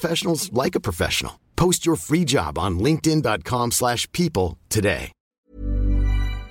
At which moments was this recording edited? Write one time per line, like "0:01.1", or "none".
0:05.4